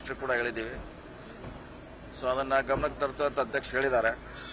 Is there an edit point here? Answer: yes; 1 cut; at 3.3 s

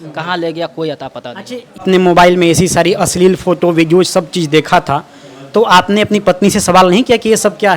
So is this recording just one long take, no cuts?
no; 1 cut; at 1.8 s

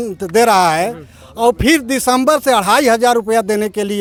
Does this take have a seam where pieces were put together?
no; 0 cuts

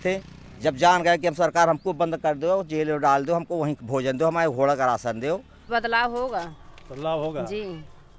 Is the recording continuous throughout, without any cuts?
no; 1 cut; at 5.6 s

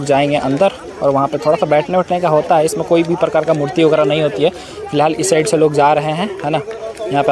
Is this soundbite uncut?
yes; 0 cuts

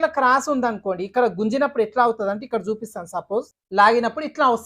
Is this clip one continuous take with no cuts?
no; 1 cut; at 3.6 s

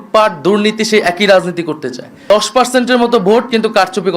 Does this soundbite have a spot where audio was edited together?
yes; 1 cut; at 2.3 s

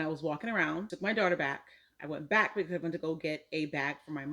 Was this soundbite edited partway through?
yes; 1 cut; at 0.9 s

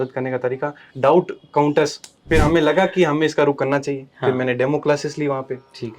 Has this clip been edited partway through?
yes; 1 cut; at 2.2 s

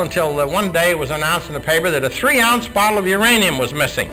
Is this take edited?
no; 0 cuts

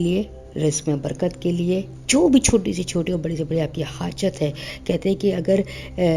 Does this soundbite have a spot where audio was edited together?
yes; 1 cut; at 1.9 s

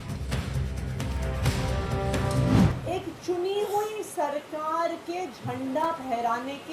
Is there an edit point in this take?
yes; 1 cut; at 2.3 s

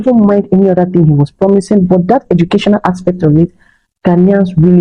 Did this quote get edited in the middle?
no; 0 cuts

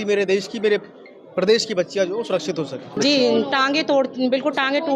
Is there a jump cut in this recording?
yes; 1 cut; at 2.9 s

